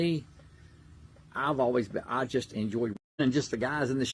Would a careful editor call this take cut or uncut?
cut